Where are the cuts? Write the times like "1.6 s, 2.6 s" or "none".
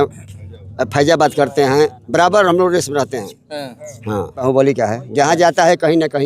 4.4 s